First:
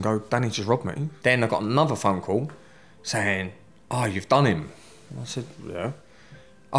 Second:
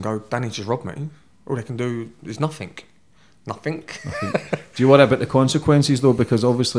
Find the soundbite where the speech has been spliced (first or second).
first